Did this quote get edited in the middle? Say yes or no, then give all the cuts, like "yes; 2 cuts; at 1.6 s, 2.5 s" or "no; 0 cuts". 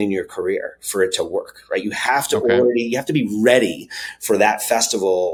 no; 0 cuts